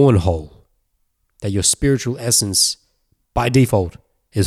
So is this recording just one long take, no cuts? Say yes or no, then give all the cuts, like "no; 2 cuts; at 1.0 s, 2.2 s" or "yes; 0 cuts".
yes; 0 cuts